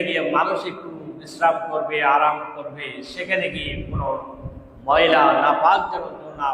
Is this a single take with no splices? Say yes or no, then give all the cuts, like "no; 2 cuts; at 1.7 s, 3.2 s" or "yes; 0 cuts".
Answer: yes; 0 cuts